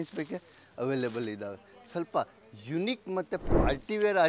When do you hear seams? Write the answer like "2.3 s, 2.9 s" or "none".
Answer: none